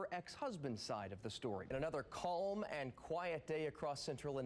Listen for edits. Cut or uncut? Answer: cut